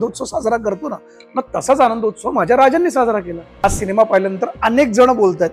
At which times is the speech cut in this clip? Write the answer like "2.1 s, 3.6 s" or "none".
3.6 s